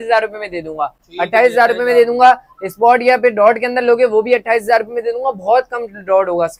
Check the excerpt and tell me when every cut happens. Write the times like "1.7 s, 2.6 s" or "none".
none